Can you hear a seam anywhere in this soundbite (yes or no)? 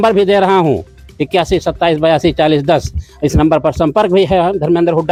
no